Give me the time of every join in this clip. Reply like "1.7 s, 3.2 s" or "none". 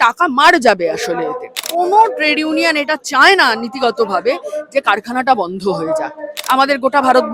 1.6 s, 6.3 s